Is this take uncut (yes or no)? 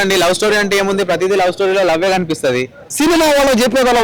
no